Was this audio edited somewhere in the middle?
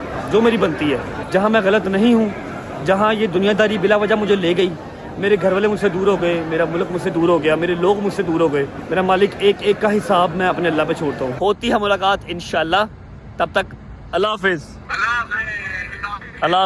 yes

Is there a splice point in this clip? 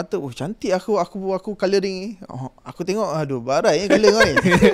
no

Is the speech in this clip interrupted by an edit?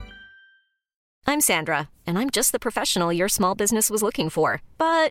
yes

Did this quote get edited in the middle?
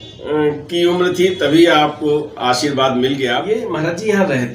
yes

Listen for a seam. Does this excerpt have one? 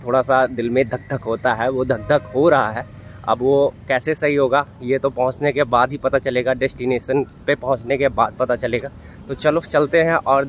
no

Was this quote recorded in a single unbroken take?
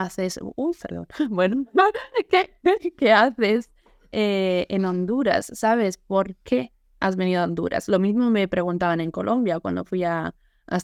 yes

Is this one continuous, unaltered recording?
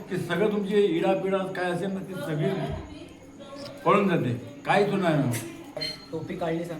no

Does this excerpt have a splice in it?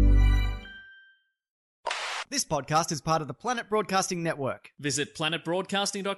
yes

